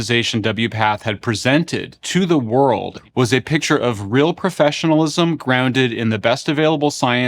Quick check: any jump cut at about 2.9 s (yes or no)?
yes